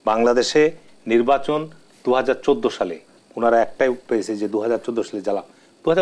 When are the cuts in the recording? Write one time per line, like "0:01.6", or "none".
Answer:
none